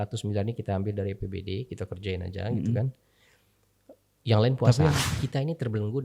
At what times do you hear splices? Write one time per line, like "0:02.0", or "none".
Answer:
0:05.1